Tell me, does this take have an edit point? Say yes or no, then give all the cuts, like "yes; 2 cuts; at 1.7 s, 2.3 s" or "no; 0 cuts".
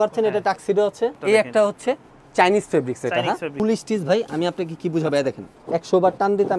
yes; 3 cuts; at 1.2 s, 3.5 s, 5.5 s